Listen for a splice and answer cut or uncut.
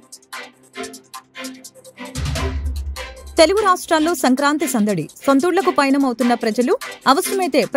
cut